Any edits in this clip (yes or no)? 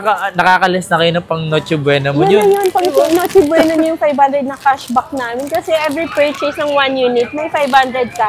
no